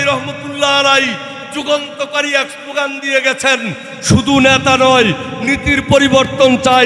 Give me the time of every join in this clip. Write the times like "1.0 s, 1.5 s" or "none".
none